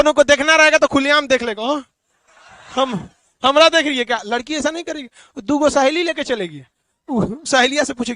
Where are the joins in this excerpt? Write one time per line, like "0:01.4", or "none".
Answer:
none